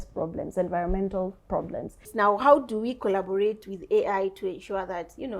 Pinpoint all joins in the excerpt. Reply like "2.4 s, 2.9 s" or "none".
2.1 s

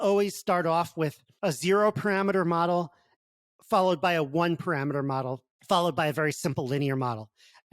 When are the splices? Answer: 1.2 s, 5.5 s

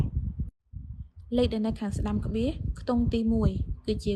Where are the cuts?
none

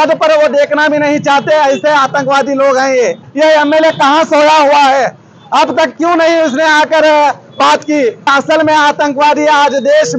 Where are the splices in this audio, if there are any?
3.3 s, 8.3 s

